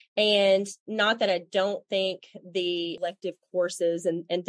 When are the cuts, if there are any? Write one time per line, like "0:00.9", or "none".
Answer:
0:03.0